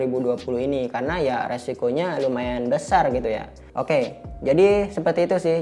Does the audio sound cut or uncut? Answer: uncut